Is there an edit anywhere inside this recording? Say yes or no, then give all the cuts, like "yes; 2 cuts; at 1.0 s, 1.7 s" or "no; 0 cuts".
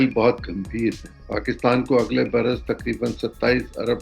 yes; 1 cut; at 1.1 s